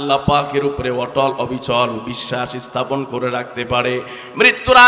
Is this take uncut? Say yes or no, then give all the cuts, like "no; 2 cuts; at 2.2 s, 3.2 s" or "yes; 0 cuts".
yes; 0 cuts